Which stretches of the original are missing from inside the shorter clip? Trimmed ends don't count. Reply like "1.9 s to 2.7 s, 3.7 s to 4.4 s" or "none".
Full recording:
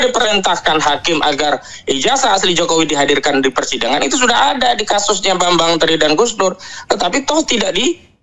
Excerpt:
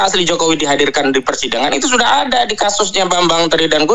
none